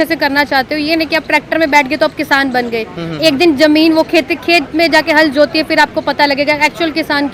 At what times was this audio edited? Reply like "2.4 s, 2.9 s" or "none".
none